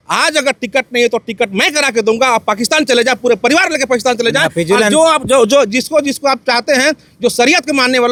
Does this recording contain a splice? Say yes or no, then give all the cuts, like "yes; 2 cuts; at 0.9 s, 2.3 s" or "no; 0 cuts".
no; 0 cuts